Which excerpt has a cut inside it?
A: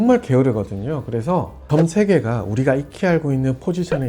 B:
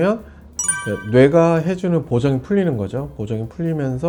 A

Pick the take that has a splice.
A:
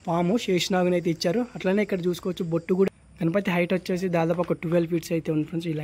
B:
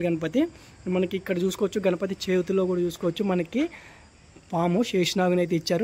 A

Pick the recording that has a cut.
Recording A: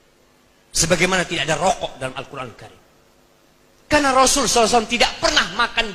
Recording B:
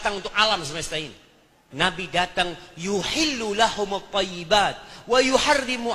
B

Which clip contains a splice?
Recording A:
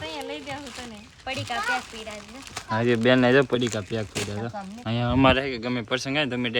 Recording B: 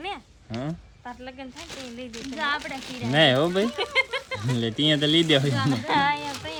A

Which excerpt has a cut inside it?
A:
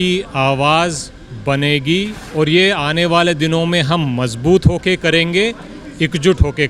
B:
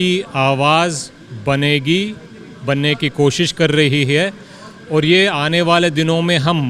A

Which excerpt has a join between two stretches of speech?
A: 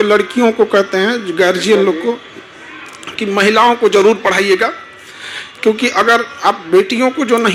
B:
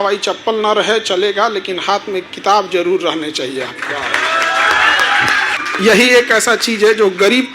B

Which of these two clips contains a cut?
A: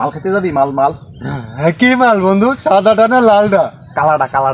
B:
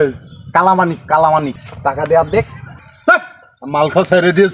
B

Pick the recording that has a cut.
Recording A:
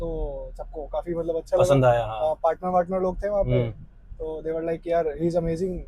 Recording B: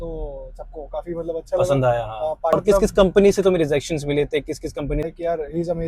B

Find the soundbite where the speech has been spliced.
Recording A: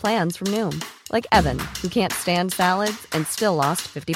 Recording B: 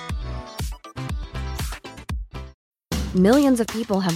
B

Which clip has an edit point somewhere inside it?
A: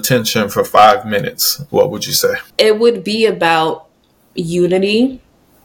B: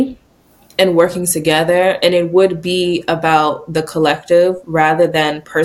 A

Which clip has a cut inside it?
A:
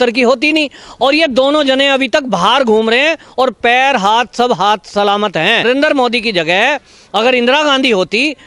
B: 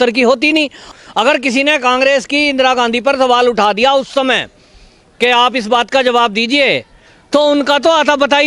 B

